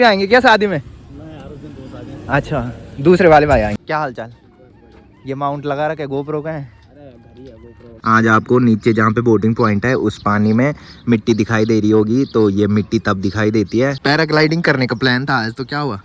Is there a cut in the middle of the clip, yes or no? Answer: yes